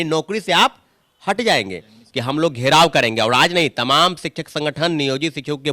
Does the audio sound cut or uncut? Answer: cut